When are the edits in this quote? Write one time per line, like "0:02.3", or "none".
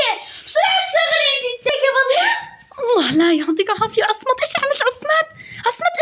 0:01.7